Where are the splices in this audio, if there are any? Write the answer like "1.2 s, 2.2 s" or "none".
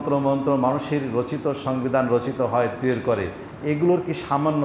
none